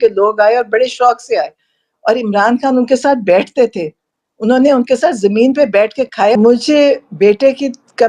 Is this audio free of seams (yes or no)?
no